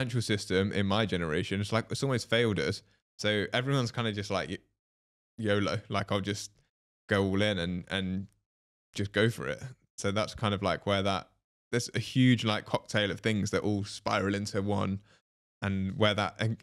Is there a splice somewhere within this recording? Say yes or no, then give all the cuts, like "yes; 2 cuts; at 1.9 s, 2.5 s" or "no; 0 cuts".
no; 0 cuts